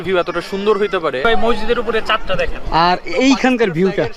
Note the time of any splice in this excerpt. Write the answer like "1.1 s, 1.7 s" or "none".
1.2 s